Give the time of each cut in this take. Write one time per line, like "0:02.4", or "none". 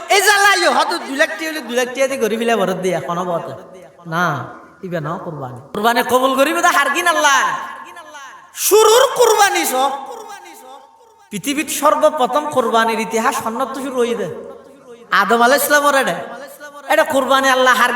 0:05.8